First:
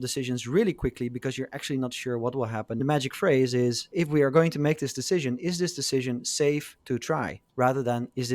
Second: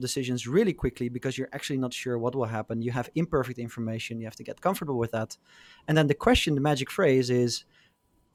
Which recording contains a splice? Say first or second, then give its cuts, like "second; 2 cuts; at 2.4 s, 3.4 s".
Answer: first; 3 cuts; at 2.8 s, 3.9 s, 7.4 s